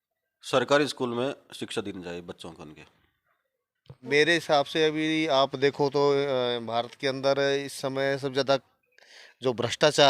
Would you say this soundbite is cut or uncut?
cut